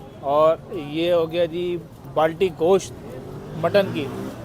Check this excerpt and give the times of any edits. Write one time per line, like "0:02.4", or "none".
0:02.1